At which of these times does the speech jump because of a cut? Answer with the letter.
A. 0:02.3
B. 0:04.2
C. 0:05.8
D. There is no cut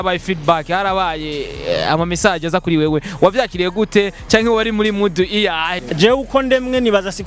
C